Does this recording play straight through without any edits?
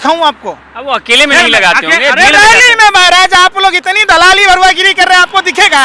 yes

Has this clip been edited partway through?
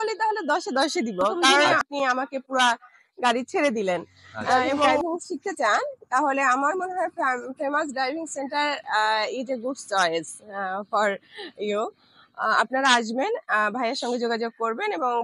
yes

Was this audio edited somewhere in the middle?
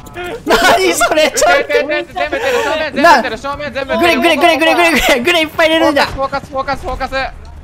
no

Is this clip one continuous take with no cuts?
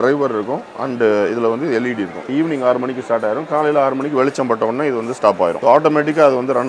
no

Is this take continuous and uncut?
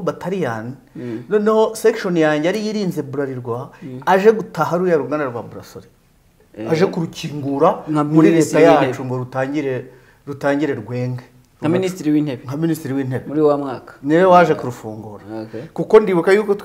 yes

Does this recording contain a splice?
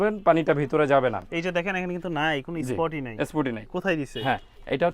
no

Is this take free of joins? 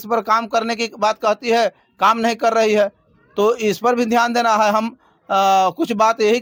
yes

